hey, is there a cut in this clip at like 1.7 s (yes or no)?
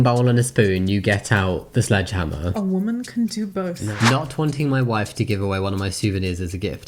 no